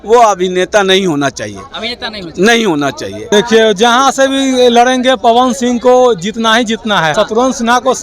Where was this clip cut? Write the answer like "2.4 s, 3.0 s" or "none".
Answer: 3.3 s, 7.1 s